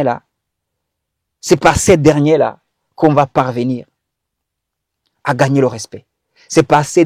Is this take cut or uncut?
uncut